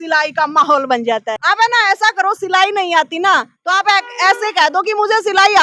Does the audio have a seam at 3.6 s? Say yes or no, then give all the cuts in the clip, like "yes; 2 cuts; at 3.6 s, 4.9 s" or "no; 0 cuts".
no; 1 cut; at 1.3 s